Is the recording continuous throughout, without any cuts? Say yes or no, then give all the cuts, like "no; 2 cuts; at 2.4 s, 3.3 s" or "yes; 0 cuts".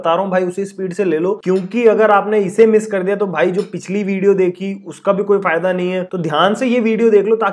no; 1 cut; at 6.1 s